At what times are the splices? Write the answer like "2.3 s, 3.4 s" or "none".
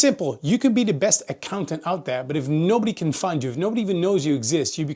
none

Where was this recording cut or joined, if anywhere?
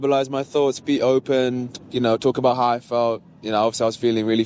none

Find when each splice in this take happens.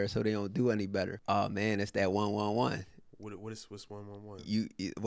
1.2 s

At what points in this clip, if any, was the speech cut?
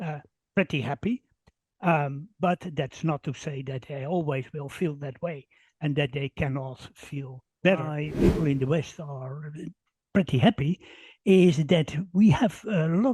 8.0 s

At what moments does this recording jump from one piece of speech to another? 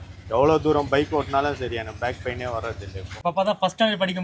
3.1 s

